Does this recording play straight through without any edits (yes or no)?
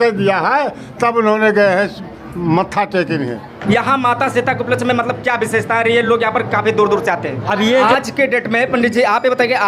no